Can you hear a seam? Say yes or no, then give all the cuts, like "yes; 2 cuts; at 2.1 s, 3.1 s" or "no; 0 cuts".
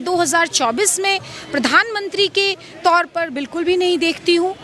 no; 0 cuts